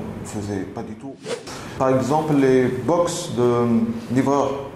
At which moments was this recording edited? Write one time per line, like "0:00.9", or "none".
0:01.0